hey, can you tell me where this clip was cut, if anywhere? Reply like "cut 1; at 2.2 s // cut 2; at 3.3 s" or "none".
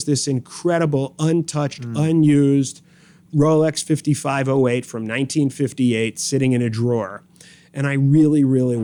none